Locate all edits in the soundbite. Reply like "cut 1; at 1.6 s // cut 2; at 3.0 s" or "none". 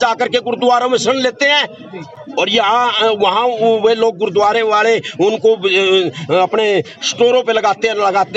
none